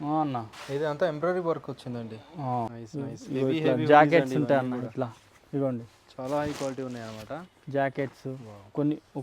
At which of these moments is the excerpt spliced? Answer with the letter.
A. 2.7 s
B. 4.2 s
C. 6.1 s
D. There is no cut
A